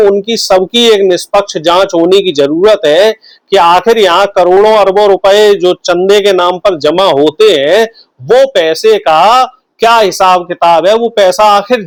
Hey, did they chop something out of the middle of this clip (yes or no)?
no